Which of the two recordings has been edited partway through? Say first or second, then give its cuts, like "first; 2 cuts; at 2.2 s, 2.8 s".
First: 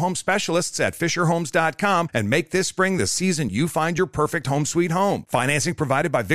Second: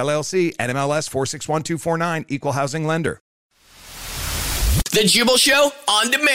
second; 1 cut; at 3.5 s